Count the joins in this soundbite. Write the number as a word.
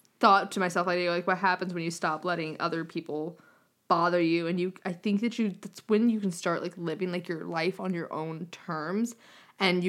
zero